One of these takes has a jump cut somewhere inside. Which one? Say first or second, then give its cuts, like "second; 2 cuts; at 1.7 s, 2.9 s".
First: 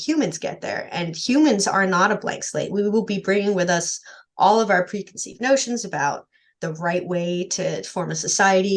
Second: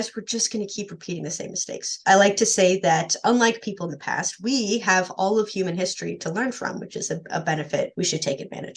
second; 2 cuts; at 1.9 s, 7.9 s